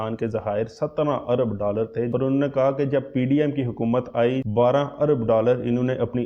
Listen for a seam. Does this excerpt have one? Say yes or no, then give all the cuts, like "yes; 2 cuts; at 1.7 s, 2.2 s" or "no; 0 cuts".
yes; 2 cuts; at 2.1 s, 4.4 s